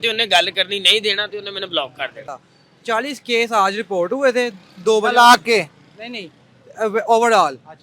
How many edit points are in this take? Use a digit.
1